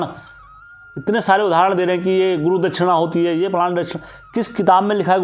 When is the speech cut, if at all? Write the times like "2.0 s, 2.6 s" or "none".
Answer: none